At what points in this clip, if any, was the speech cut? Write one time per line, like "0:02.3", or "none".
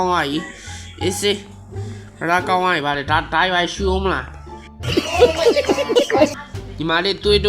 0:06.4